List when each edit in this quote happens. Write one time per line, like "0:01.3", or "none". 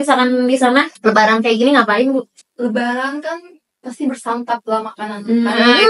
0:00.9
0:02.4